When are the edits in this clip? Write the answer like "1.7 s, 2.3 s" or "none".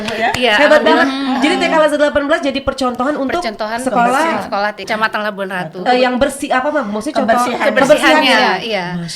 4.9 s